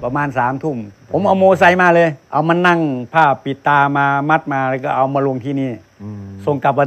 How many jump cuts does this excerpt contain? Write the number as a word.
two